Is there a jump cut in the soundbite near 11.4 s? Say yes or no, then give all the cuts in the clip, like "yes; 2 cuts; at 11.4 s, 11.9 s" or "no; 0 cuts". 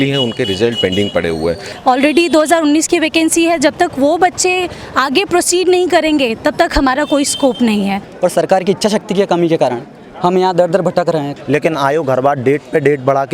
yes; 3 cuts; at 1.7 s, 8.0 s, 11.4 s